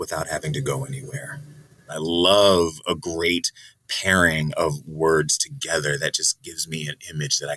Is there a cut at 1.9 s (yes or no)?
yes